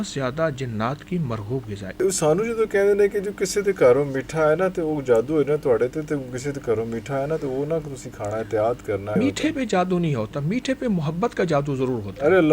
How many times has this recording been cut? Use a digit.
2